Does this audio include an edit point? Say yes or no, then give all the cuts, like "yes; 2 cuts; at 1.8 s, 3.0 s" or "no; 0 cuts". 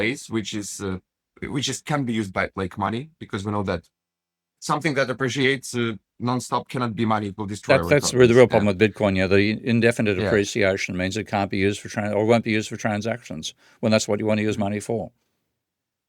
no; 0 cuts